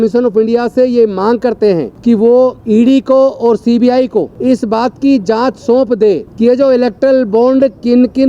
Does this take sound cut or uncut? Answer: cut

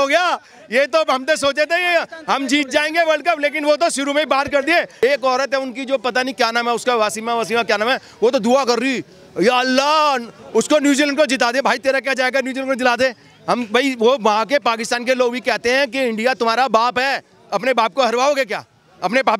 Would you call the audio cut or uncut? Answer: cut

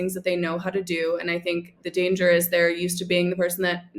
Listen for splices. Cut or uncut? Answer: cut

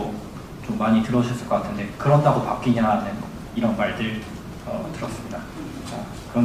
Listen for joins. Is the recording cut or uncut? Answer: uncut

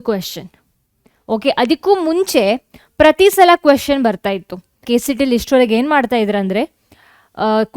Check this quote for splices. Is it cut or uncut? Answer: cut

